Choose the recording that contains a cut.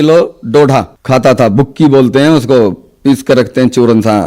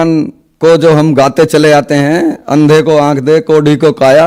first; 1 cut; at 1.0 s

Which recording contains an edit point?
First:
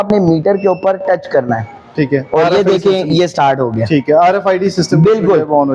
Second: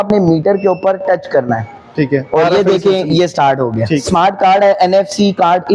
second; 1 cut; at 4.0 s

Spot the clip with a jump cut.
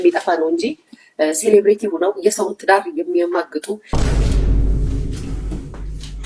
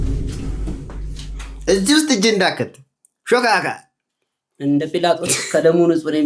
first; 1 cut; at 3.9 s

